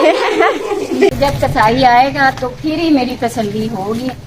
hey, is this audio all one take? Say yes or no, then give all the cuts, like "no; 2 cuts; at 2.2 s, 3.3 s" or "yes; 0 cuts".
no; 1 cut; at 1.1 s